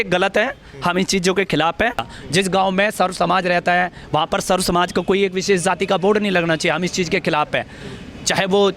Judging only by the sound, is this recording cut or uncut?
cut